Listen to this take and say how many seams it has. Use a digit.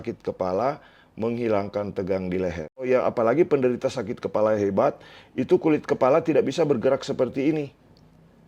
1